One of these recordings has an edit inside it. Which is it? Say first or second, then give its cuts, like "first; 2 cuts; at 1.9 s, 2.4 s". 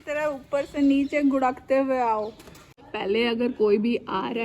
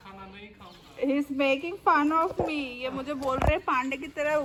first; 1 cut; at 2.7 s